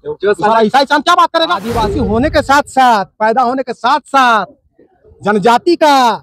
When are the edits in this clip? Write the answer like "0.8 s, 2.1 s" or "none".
1.8 s

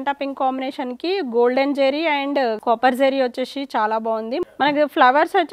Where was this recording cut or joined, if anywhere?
2.6 s, 4.4 s

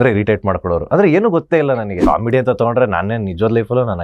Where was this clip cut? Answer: 2.0 s

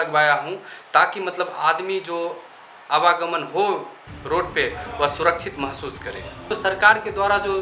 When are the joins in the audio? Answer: 6.5 s

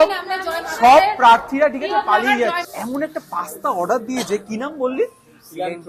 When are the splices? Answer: 2.7 s

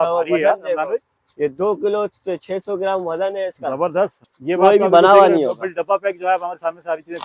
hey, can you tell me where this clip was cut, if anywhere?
4.2 s

